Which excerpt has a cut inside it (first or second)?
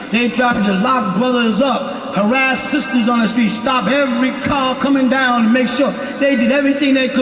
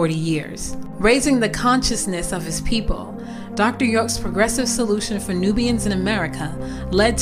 first